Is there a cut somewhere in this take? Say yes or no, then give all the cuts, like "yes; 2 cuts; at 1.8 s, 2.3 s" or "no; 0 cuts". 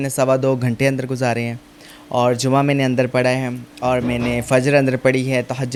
no; 0 cuts